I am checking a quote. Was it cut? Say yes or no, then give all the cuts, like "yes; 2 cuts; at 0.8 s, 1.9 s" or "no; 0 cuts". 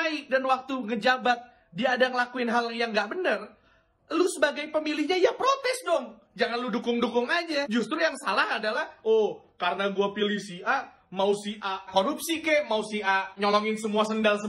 no; 0 cuts